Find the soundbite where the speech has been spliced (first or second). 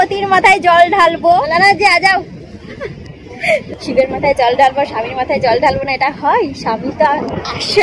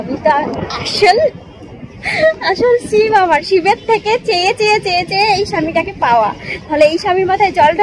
first